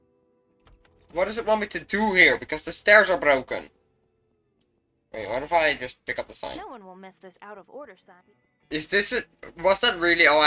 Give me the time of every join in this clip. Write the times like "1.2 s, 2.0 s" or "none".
8.1 s